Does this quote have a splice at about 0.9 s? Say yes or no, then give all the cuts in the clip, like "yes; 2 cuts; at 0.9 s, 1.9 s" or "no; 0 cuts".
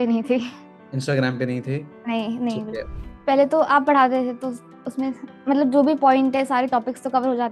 no; 1 cut; at 2.9 s